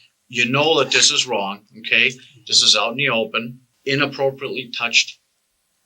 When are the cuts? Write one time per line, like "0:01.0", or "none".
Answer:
0:03.6

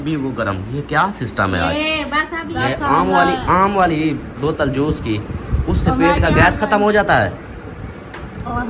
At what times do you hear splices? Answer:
0:02.4

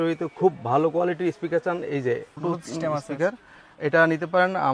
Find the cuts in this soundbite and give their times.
0:02.4

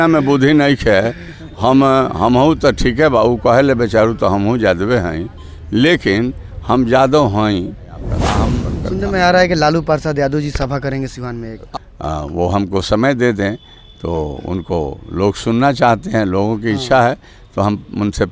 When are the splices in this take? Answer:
0:08.4
0:11.7

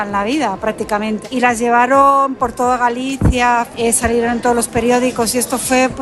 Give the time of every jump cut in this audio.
0:01.2
0:03.7

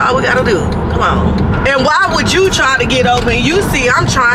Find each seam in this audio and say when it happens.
0:01.5

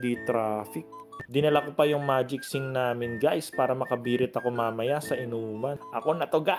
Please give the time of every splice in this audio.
0:01.2

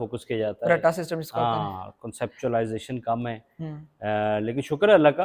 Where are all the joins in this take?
none

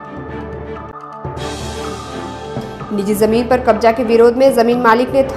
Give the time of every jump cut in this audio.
0:00.9
0:02.2

